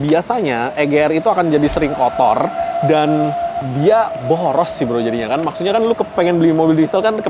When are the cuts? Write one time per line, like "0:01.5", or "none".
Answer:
none